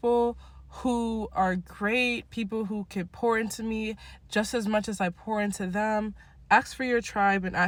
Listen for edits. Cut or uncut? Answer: uncut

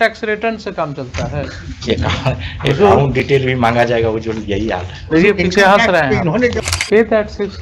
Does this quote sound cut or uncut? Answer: cut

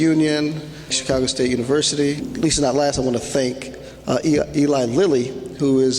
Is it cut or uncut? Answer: cut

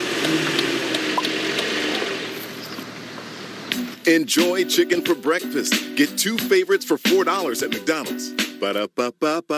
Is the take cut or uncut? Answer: uncut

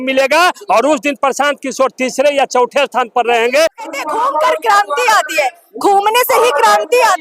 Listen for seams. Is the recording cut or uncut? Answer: cut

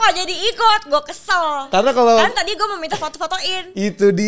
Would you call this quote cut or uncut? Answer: uncut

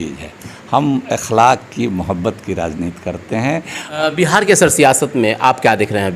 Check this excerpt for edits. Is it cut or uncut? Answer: cut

